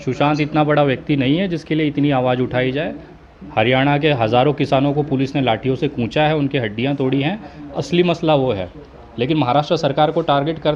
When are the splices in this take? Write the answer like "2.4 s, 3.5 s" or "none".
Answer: none